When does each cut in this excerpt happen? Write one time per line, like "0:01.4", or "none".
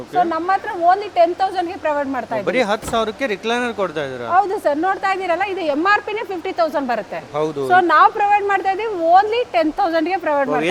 none